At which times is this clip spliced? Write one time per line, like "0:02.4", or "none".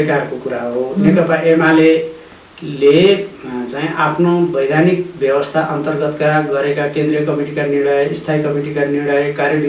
none